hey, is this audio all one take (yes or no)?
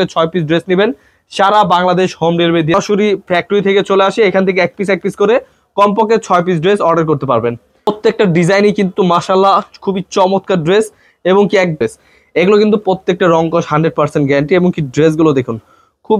no